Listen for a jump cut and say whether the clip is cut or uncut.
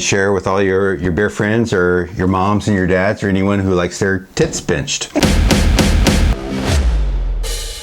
cut